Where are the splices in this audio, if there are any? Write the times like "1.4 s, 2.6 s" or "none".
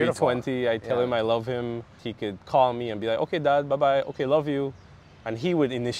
none